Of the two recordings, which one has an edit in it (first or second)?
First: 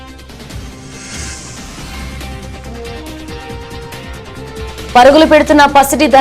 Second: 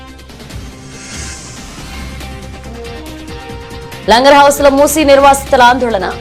first